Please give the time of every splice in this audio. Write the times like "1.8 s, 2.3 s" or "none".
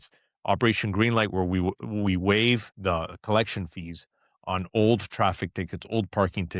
2.7 s

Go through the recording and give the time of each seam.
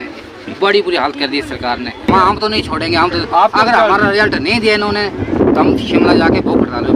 2.1 s

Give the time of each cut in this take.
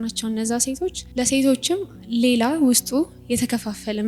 1.0 s

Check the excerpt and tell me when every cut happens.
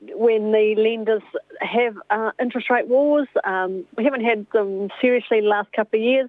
none

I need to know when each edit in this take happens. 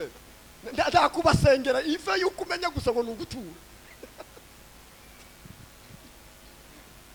none

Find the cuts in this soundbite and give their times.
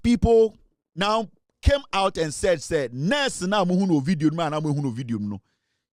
none

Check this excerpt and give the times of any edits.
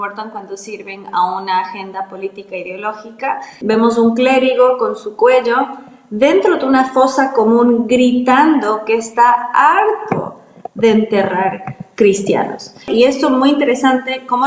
3.5 s, 12.9 s

